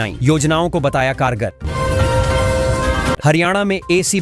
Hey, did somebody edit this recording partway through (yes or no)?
yes